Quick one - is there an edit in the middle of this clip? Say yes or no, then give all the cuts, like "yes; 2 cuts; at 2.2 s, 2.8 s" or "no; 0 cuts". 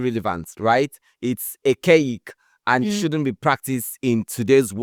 no; 0 cuts